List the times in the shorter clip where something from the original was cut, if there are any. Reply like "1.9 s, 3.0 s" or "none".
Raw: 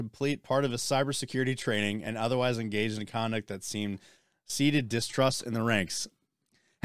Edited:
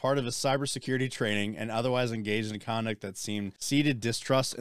3.6 s